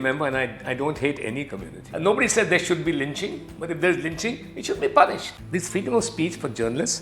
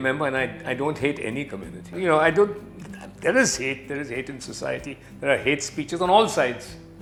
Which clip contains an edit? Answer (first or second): first